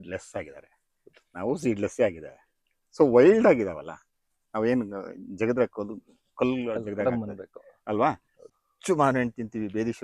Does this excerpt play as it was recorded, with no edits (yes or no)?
no